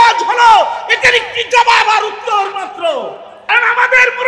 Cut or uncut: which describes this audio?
cut